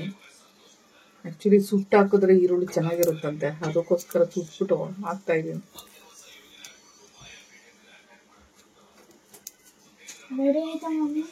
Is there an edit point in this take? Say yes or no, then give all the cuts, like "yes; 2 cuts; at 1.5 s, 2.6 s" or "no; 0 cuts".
no; 0 cuts